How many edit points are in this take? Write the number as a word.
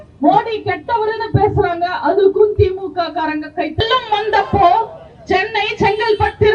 one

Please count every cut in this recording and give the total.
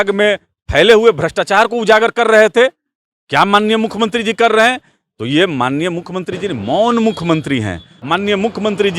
one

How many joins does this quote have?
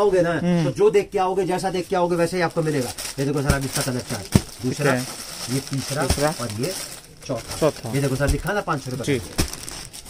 zero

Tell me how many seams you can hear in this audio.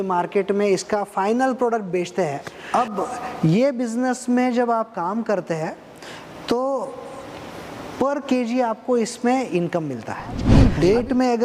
two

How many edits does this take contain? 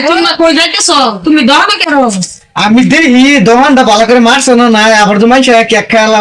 zero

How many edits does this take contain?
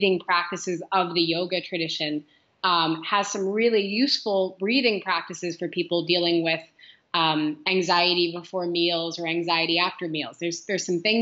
zero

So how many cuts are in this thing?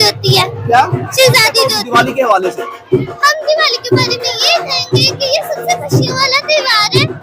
zero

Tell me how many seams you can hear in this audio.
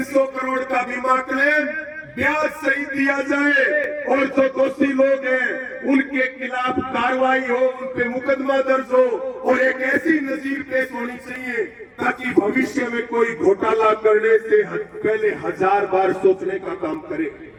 zero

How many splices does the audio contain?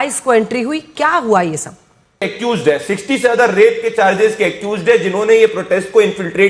one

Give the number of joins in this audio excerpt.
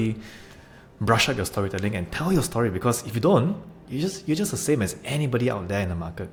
zero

